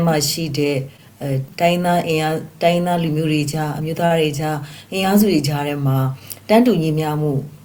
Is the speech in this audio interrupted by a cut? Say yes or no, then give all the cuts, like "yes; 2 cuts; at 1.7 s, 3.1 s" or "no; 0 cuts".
no; 0 cuts